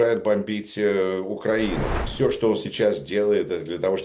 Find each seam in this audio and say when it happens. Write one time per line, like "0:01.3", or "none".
0:02.0